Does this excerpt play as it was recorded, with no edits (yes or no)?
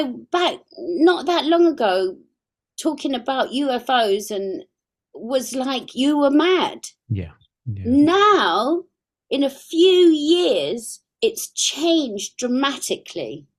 yes